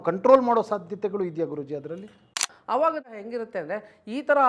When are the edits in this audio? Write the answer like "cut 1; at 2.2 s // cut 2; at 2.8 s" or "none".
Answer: cut 1; at 2.5 s // cut 2; at 3.2 s